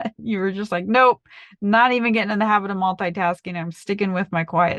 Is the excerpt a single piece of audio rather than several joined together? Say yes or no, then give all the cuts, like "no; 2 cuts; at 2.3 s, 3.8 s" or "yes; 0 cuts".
yes; 0 cuts